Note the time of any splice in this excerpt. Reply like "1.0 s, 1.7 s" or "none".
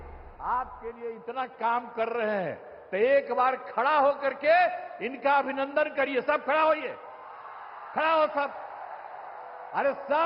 none